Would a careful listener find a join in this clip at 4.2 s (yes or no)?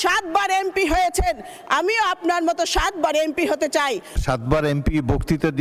yes